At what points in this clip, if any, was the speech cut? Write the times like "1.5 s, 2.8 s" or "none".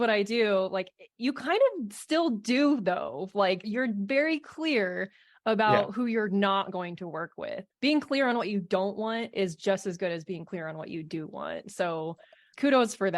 3.7 s, 7.6 s